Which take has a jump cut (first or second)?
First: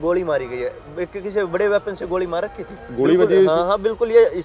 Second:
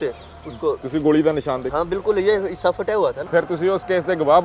second